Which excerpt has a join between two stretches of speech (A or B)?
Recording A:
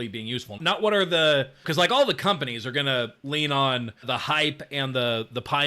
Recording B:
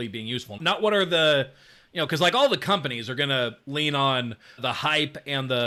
A